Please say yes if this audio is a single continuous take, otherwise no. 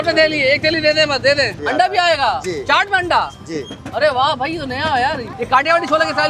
no